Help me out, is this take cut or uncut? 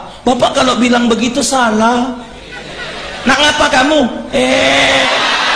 uncut